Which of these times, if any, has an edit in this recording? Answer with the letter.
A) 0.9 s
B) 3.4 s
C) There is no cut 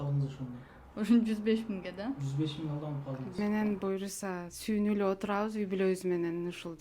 B